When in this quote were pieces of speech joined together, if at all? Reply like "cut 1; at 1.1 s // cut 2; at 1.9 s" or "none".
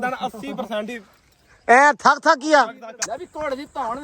cut 1; at 2.9 s